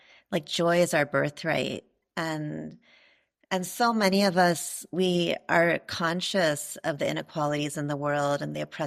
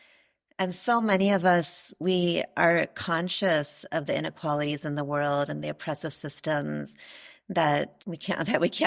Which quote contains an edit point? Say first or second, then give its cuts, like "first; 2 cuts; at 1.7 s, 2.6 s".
second; 1 cut; at 8.0 s